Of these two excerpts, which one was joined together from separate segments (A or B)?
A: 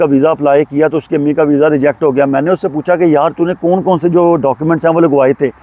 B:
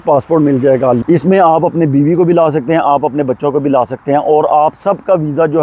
B